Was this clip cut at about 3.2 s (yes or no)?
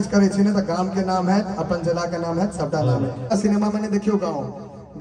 yes